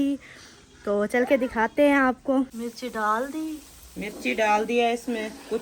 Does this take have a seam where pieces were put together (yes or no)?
yes